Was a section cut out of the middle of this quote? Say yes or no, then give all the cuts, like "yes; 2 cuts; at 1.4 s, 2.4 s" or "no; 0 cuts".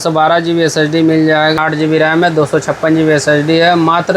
yes; 1 cut; at 1.6 s